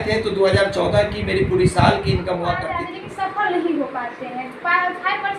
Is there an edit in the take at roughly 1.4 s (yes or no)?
no